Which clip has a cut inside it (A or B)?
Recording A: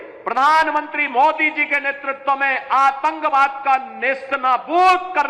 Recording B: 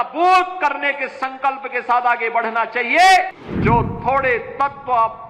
B